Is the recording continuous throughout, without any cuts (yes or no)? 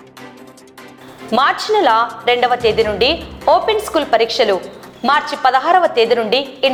yes